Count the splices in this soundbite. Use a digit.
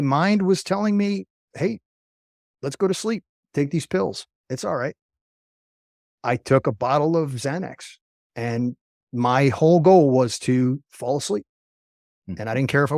0